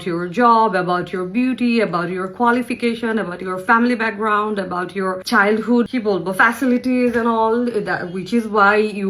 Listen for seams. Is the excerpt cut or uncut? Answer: cut